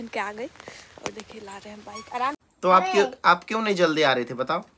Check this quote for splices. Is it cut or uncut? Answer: cut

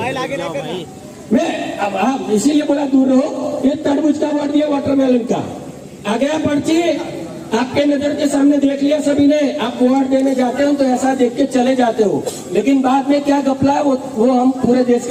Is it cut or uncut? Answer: uncut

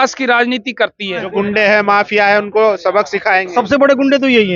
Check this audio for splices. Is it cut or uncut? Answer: cut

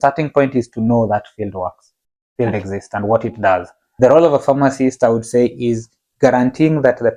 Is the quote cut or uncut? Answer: cut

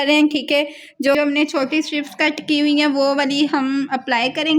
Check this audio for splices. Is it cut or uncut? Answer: cut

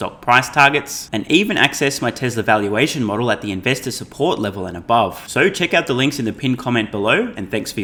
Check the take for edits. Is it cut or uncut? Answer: uncut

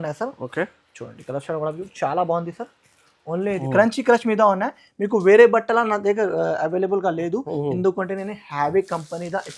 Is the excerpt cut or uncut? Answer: cut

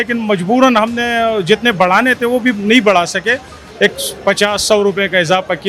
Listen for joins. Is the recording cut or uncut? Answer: uncut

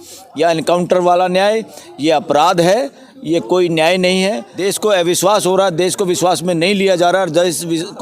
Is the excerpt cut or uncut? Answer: cut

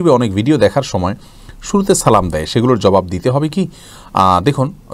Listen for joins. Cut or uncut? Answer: uncut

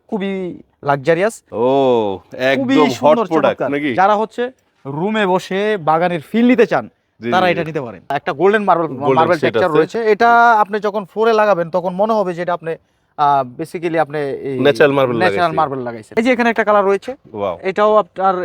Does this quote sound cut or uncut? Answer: cut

